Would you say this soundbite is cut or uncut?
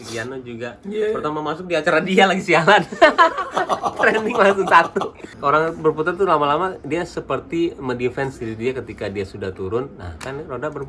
cut